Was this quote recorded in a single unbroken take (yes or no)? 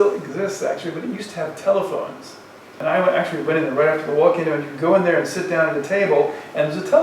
no